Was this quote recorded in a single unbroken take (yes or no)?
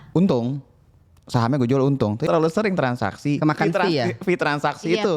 no